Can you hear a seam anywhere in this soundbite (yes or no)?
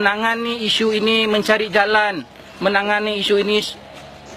yes